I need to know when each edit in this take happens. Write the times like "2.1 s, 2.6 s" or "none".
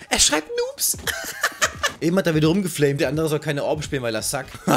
1.9 s, 3.0 s

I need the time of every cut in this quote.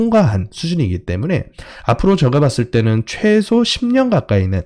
none

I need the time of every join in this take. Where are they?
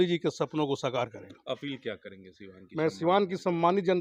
none

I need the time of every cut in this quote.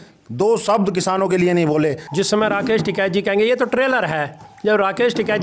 2.0 s

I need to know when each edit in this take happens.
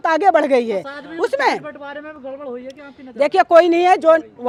none

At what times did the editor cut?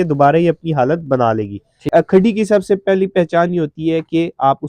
1.8 s

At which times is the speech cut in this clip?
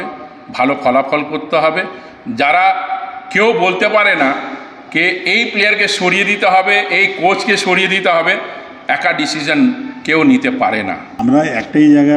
11.1 s

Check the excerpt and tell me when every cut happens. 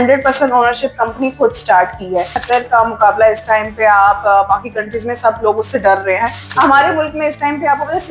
2.4 s, 6.4 s

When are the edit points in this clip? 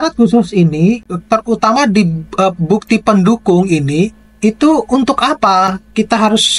none

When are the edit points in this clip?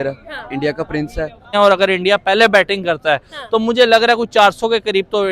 1.5 s

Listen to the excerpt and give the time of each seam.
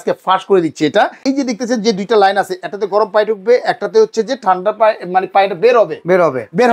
1.2 s

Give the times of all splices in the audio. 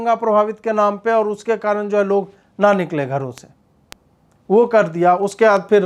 none

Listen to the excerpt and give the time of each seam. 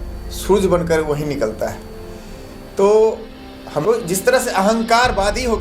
3.8 s

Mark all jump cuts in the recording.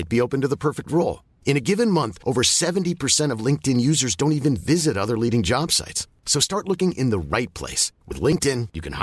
none

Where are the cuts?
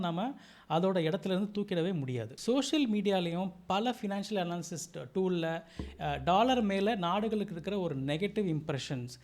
2.3 s

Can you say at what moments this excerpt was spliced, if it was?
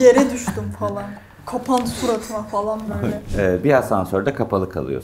3.2 s

